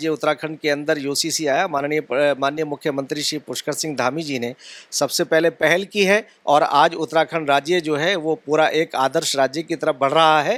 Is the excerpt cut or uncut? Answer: uncut